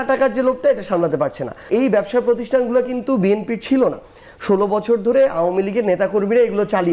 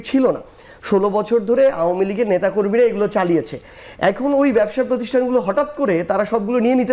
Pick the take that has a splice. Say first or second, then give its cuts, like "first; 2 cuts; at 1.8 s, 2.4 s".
first; 1 cut; at 1.7 s